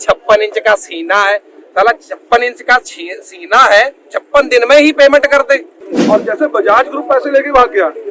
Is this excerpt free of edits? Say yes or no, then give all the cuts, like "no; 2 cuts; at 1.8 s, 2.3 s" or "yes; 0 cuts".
no; 1 cut; at 5.8 s